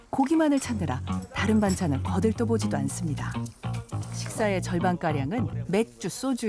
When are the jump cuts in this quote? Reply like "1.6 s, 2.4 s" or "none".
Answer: 4.2 s, 5.6 s